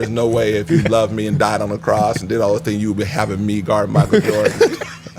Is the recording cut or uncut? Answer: uncut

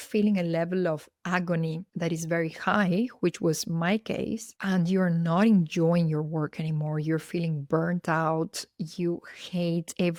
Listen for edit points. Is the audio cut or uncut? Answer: uncut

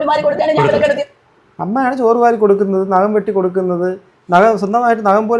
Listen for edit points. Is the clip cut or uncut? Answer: uncut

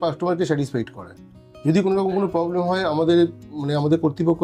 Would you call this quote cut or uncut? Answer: uncut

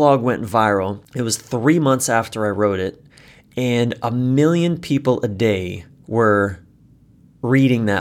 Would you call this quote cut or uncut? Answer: cut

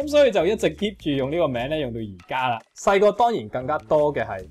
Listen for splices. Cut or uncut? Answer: cut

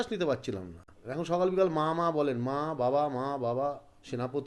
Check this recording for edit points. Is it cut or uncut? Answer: cut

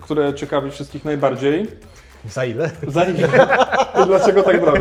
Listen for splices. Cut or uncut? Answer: uncut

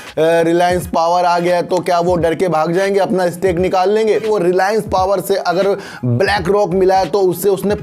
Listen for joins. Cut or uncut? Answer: cut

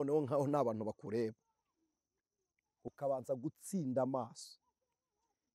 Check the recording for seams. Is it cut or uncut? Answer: uncut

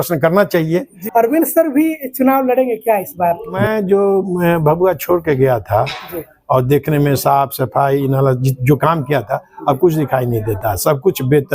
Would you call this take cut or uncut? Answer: cut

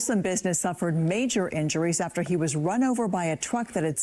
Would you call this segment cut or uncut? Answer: uncut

